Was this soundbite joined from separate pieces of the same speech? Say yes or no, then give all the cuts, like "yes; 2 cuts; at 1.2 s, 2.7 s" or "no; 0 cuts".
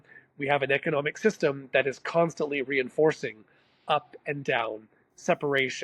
no; 0 cuts